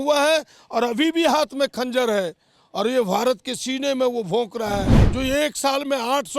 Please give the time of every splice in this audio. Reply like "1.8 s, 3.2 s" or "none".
5.0 s